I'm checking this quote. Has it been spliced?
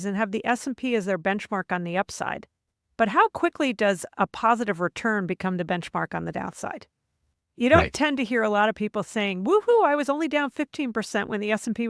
no; 0 cuts

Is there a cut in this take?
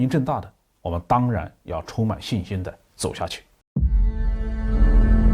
yes; 1 cut; at 3.5 s

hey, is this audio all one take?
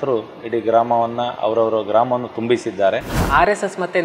no; 1 cut; at 3.1 s

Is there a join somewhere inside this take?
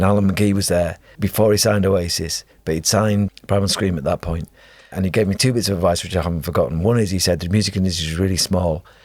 yes; 3 cuts; at 1.1 s, 3.3 s, 4.9 s

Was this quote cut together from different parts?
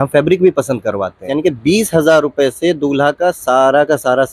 yes; 1 cut; at 1.3 s

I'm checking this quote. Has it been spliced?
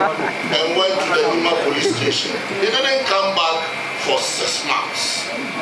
no; 0 cuts

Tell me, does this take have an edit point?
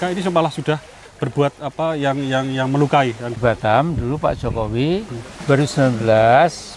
yes; 1 cut; at 3.4 s

